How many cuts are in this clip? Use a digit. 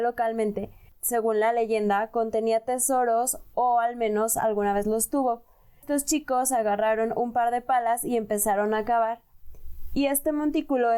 2